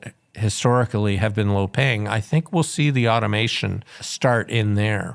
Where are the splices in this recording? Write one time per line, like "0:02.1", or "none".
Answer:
0:04.1